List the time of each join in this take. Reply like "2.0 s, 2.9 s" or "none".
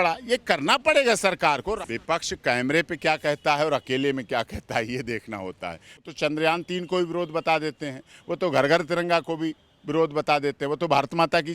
1.8 s, 6.0 s